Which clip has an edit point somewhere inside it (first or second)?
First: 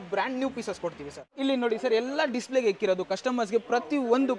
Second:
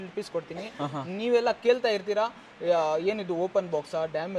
first